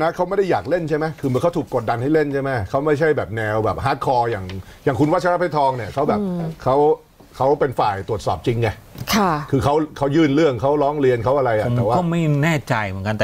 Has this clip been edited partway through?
no; 0 cuts

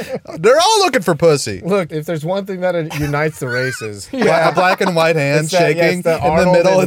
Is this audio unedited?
no; 2 cuts; at 1.9 s, 4.0 s

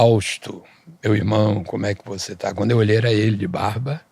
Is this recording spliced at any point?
no; 0 cuts

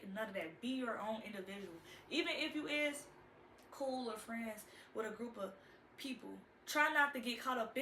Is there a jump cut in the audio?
no; 0 cuts

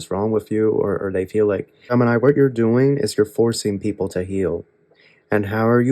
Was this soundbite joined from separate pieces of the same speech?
yes; 1 cut; at 1.8 s

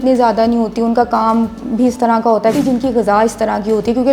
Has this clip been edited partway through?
yes; 1 cut; at 2.5 s

